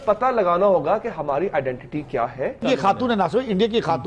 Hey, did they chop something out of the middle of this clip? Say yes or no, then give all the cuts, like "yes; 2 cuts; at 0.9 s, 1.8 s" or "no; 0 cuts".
yes; 1 cut; at 2.6 s